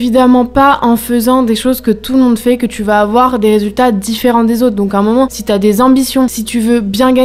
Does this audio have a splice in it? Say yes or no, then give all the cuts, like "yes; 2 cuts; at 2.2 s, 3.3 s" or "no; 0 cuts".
no; 0 cuts